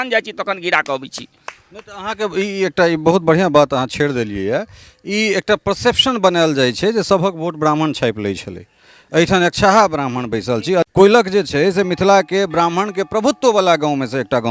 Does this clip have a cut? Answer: yes; 1 cut; at 10.9 s

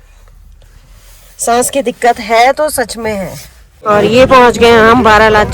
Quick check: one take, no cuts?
no; 1 cut; at 3.8 s

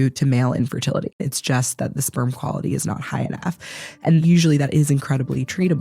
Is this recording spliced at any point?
yes; 2 cuts; at 1.2 s, 4.1 s

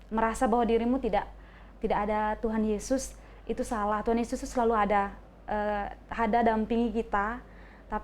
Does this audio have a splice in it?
no; 0 cuts

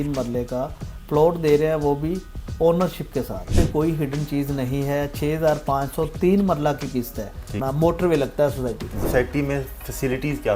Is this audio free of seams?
no; 3 cuts; at 3.6 s, 7.6 s, 9.0 s

